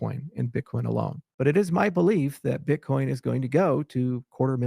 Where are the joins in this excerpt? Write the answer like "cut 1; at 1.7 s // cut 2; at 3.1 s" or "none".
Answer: cut 1; at 1.2 s

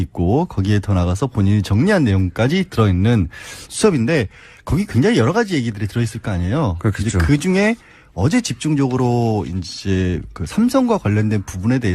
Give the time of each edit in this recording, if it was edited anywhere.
none

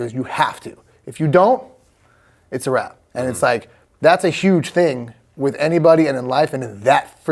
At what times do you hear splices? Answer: cut 1; at 3.0 s

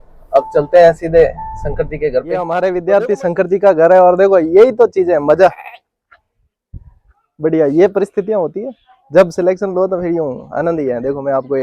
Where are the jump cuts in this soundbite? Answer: cut 1; at 2.4 s

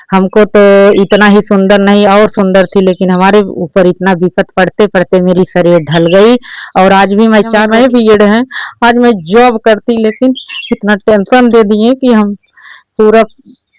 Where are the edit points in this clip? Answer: cut 1; at 7.7 s

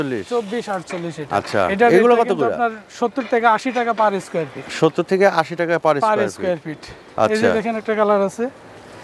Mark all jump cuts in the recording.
none

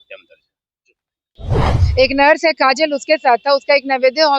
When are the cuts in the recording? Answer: cut 1; at 1.4 s

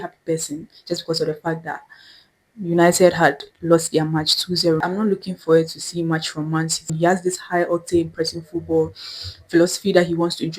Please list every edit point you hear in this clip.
cut 1; at 4.8 s // cut 2; at 6.9 s

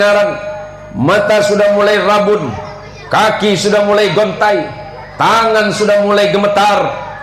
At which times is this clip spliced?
none

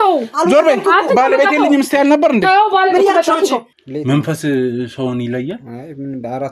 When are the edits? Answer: cut 1; at 3.8 s

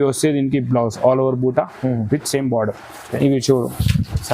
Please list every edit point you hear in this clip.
cut 1; at 3.2 s

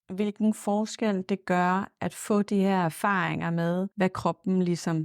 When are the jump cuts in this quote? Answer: cut 1; at 3.9 s

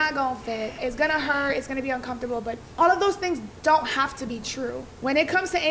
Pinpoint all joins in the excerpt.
cut 1; at 0.8 s // cut 2; at 2.6 s // cut 3; at 4.8 s

